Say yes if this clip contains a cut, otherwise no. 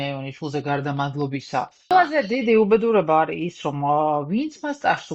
yes